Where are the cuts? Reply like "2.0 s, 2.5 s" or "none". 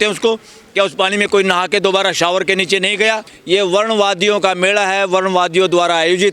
3.3 s